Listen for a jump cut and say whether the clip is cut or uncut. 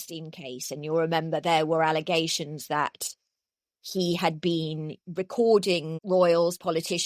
cut